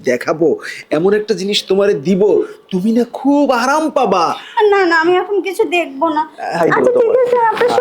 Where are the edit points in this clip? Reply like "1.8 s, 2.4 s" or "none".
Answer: 6.6 s